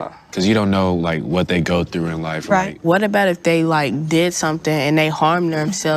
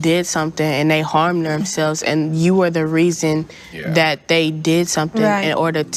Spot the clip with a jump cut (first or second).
first